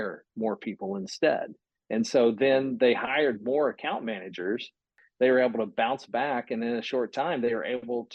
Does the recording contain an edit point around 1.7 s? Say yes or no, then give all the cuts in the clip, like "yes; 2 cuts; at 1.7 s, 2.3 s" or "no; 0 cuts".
no; 1 cut; at 4.9 s